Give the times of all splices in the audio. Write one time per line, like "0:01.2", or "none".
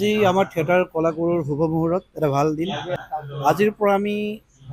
0:03.0